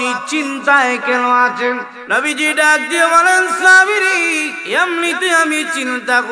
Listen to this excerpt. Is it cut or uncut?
cut